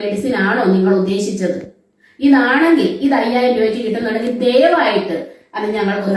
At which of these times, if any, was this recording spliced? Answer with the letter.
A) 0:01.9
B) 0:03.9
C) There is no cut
C